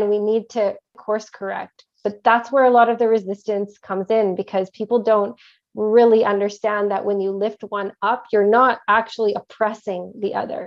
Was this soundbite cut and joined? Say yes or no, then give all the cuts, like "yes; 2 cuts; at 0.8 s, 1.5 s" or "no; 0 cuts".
yes; 1 cut; at 0.9 s